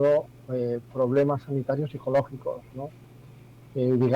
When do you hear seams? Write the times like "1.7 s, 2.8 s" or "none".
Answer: none